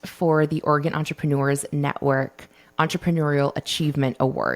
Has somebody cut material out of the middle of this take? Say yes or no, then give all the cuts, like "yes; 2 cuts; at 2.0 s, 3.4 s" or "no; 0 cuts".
no; 0 cuts